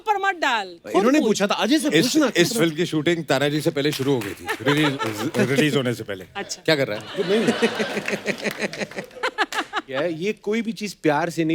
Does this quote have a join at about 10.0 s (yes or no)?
yes